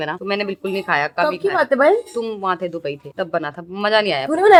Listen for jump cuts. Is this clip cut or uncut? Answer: uncut